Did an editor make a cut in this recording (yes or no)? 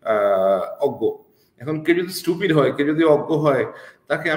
no